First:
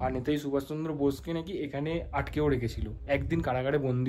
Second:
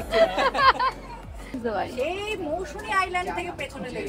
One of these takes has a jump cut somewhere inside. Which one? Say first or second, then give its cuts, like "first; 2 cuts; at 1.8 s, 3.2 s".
second; 1 cut; at 1.5 s